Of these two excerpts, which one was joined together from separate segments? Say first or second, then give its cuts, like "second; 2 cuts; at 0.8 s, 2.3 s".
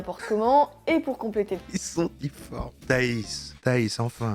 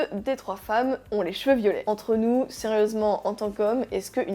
second; 1 cut; at 1.8 s